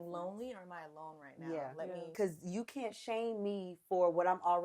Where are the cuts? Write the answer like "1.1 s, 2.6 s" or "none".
2.1 s